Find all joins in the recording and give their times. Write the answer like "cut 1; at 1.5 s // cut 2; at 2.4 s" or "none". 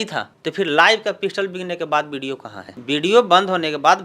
cut 1; at 2.7 s